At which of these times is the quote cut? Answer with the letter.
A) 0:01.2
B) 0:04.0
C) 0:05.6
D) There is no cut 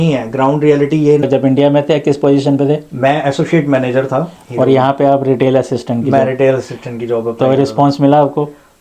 A